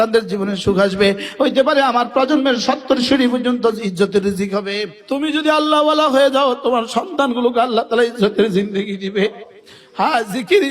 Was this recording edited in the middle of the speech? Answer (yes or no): yes